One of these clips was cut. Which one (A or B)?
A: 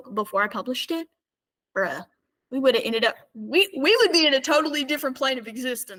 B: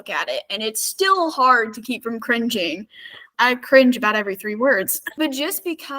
B